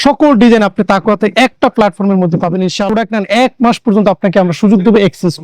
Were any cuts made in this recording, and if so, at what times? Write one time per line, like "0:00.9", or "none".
0:02.8